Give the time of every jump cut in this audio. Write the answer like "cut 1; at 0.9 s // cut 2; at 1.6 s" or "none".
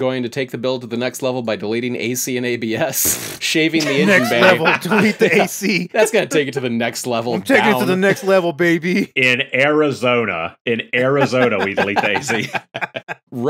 none